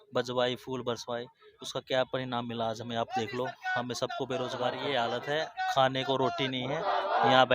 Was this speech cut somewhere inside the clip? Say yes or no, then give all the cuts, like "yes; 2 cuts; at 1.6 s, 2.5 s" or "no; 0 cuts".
yes; 1 cut; at 4.7 s